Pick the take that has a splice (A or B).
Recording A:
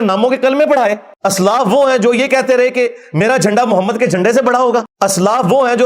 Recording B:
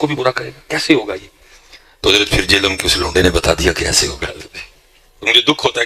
A